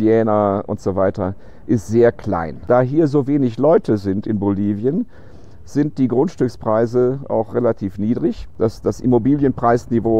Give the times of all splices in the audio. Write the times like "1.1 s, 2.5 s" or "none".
2.6 s, 8.5 s